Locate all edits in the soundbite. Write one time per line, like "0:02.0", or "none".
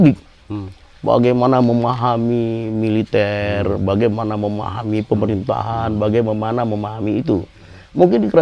none